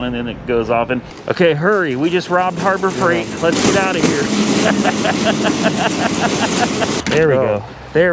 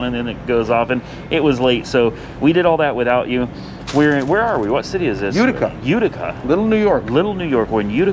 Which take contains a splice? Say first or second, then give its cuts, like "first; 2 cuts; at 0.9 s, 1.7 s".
first; 2 cuts; at 1.1 s, 7.0 s